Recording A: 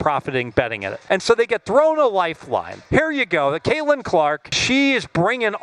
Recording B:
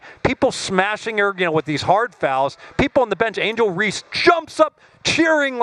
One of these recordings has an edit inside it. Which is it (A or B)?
A